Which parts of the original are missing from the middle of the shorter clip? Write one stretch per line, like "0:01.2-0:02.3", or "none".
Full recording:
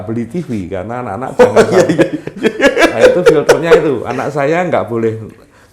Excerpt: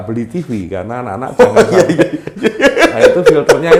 none